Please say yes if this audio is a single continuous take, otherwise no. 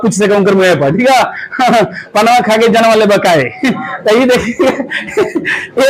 yes